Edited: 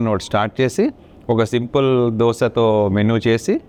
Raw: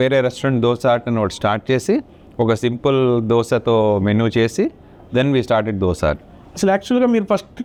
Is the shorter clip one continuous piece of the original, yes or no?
yes